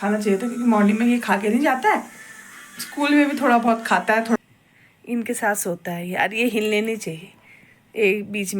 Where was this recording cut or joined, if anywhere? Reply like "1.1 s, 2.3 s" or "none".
4.4 s